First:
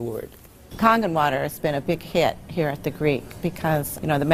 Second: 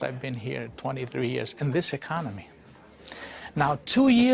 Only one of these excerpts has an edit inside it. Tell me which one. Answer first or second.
second